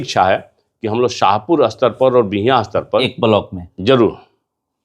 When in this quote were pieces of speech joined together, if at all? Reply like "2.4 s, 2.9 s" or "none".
3.1 s